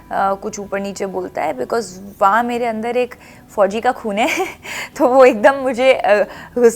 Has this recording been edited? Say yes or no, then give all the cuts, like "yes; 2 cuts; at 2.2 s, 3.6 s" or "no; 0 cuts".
no; 0 cuts